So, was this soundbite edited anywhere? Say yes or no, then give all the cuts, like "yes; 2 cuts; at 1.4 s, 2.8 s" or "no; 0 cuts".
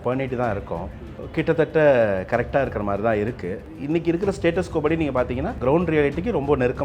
yes; 2 cuts; at 3.6 s, 5.5 s